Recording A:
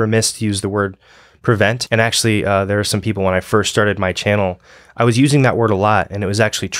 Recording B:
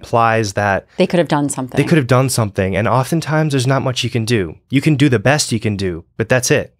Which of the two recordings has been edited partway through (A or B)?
A